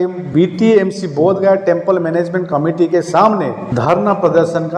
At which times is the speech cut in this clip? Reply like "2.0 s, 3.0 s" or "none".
3.6 s